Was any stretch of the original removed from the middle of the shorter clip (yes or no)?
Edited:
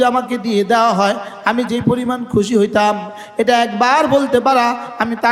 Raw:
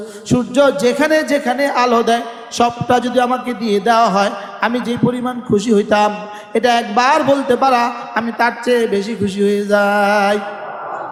no